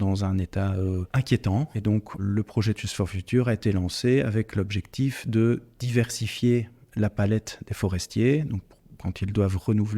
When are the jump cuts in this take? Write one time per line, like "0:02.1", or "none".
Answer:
0:01.1